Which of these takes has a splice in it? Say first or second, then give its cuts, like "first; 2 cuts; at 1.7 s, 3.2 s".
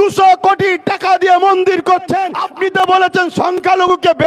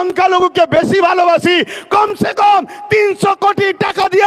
first; 1 cut; at 2.4 s